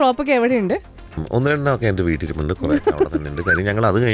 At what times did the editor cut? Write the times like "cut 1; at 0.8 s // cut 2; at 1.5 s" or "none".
cut 1; at 1.2 s